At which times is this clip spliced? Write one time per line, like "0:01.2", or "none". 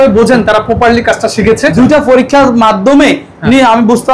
0:01.7